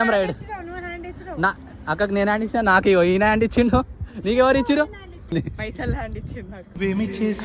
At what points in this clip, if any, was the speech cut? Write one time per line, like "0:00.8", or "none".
none